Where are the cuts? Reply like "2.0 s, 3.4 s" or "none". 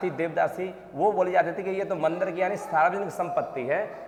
none